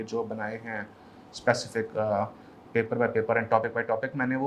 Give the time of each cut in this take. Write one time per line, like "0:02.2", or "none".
none